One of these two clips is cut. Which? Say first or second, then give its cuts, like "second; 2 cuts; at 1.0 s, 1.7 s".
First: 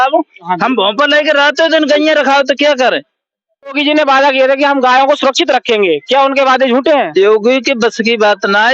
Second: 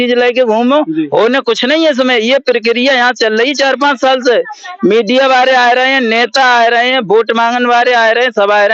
first; 1 cut; at 3.8 s